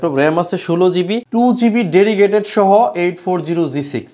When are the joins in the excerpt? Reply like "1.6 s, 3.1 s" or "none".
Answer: 1.2 s